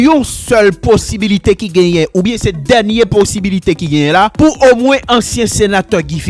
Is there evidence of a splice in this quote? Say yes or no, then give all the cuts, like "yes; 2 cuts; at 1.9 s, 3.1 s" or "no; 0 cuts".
yes; 1 cut; at 4.3 s